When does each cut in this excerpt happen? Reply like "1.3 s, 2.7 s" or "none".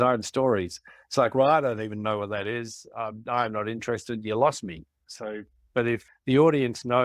6.1 s